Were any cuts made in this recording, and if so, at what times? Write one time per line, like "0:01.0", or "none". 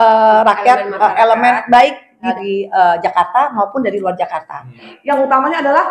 0:02.3
0:04.9